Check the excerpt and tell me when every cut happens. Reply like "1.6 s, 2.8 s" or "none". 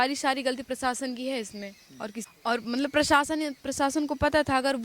2.2 s